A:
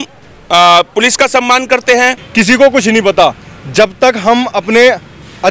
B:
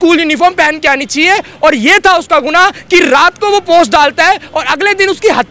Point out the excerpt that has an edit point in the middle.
A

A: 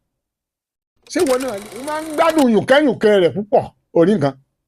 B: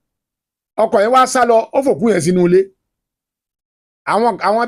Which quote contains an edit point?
A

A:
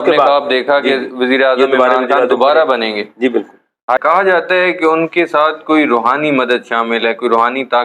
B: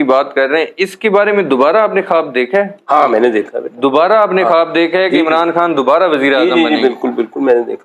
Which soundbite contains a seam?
A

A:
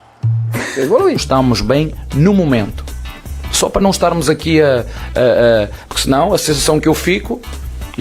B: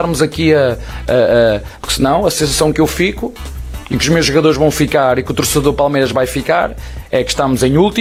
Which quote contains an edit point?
A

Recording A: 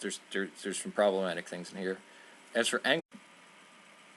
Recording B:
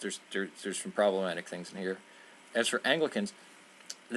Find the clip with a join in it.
B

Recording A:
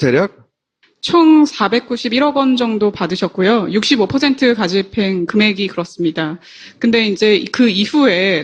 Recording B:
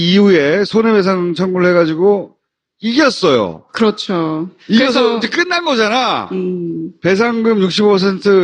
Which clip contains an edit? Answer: B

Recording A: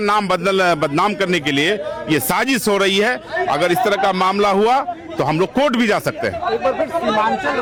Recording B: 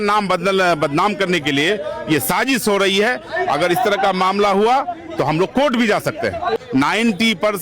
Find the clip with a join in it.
B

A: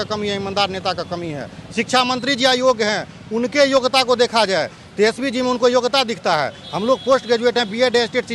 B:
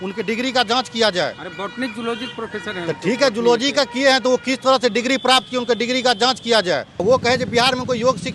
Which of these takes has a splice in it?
B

